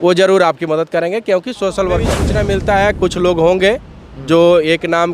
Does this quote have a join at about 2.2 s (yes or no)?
yes